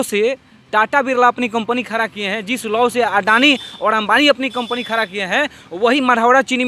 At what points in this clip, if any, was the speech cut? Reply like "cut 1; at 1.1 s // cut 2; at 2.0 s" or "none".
none